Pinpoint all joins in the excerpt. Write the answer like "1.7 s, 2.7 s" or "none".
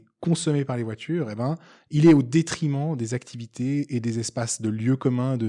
none